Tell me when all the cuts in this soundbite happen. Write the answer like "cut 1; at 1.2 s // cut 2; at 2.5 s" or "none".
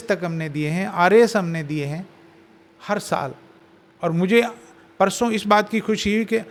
none